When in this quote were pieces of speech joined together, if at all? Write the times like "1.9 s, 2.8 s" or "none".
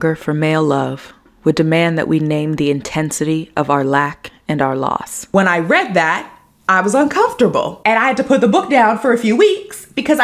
none